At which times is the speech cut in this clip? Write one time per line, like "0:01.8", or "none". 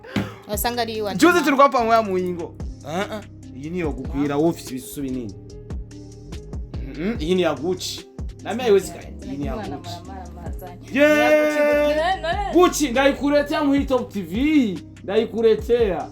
0:05.4
0:06.8

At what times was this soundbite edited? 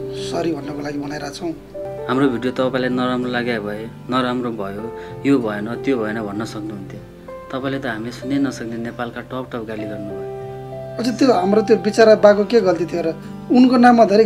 0:01.9

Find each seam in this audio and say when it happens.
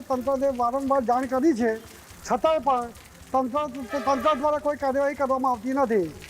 none

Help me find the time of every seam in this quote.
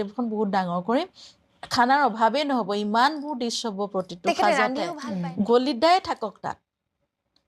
0:05.0

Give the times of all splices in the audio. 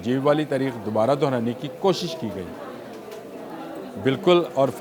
none

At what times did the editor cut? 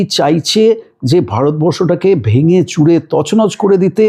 none

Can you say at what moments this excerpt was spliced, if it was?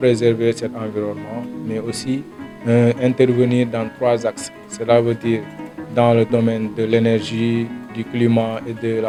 none

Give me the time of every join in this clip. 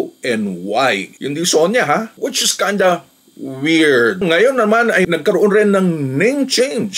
0:01.2
0:04.2
0:05.1

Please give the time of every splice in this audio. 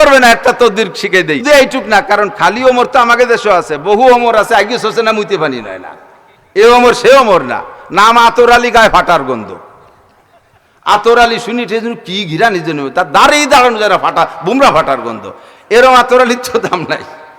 0:01.4

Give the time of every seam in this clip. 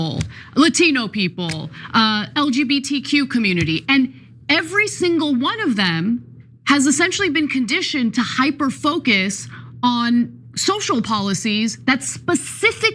none

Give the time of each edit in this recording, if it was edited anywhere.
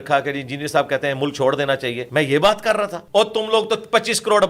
0:02.0
0:03.0

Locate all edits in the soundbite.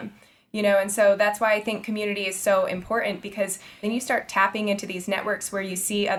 0:03.8

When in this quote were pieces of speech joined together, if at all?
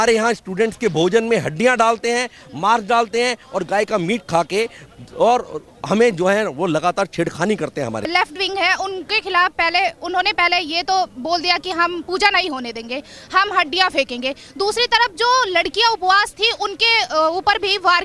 none

